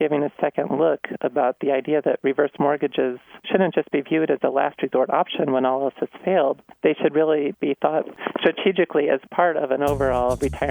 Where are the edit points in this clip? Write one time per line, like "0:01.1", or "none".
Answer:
0:03.3
0:06.7
0:08.1